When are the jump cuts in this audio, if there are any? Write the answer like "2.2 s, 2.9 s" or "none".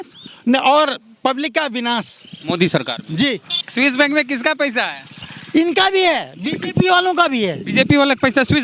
3.6 s

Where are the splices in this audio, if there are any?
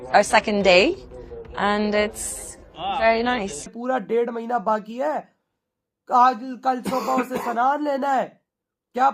3.7 s

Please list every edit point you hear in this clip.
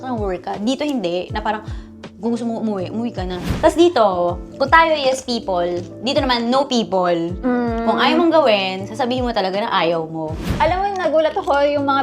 3.5 s, 10.5 s

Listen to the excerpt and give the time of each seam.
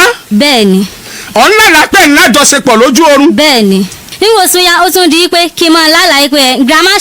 4.0 s

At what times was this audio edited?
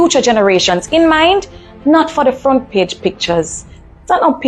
none

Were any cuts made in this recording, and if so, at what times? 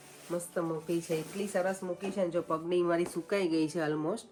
none

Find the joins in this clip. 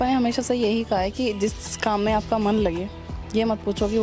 none

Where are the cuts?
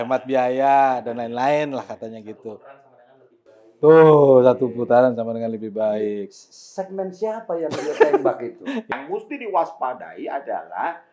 8.9 s

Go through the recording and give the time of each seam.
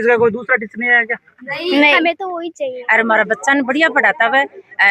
2.8 s

